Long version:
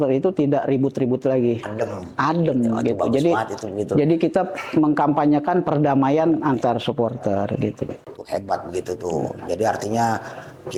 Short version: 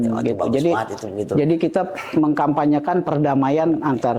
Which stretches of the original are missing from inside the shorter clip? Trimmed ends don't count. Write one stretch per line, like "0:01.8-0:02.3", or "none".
none